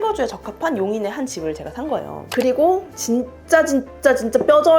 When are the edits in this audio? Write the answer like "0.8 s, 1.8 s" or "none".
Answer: 2.2 s

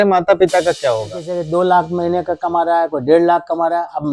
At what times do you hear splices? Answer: 1.3 s

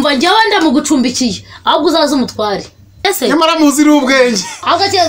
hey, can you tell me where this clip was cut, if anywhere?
3.0 s

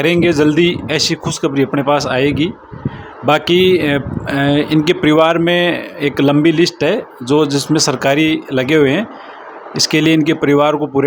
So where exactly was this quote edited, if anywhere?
none

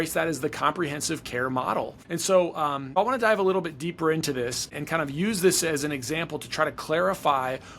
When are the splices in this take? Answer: 2.0 s, 3.0 s, 4.7 s

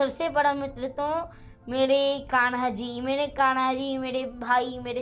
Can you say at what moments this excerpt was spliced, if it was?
none

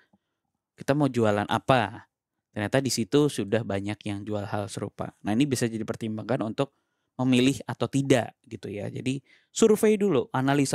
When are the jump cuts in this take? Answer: none

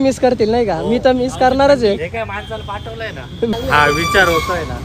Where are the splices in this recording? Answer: 3.5 s

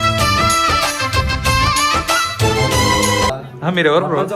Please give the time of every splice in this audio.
3.3 s

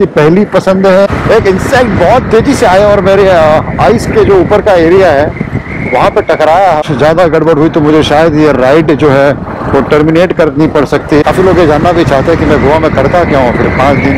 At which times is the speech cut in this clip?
1.1 s, 6.8 s, 11.2 s

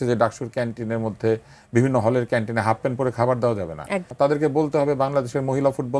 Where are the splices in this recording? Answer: 4.1 s

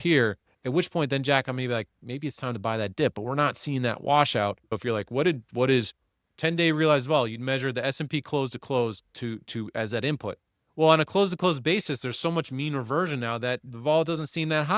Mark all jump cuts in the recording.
4.8 s

